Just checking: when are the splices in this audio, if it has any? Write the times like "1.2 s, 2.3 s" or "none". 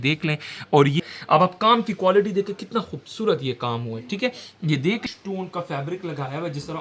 1.0 s, 5.0 s